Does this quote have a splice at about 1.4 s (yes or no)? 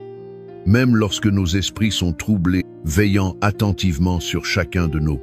no